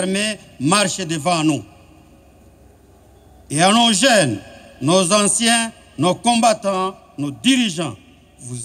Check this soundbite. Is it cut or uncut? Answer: uncut